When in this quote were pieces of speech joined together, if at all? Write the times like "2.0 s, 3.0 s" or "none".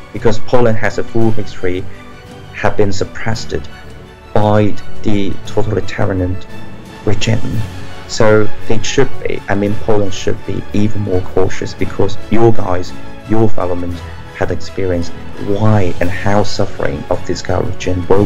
none